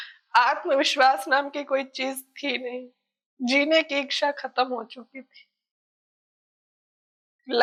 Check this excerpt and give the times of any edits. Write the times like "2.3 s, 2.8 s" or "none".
none